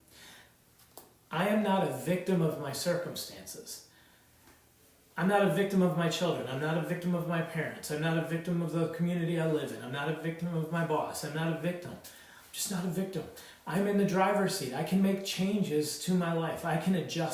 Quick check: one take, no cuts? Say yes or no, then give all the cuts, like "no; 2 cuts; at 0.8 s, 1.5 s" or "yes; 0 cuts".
yes; 0 cuts